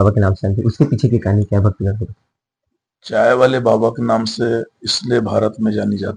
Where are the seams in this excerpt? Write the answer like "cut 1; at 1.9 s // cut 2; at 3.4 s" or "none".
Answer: none